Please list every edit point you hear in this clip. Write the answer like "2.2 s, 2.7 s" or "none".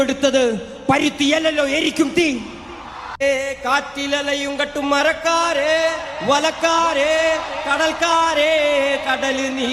3.2 s